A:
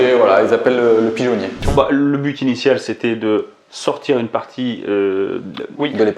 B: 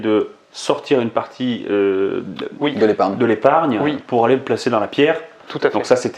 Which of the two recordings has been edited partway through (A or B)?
A